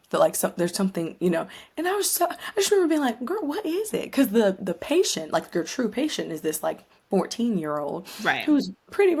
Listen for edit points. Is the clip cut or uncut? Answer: uncut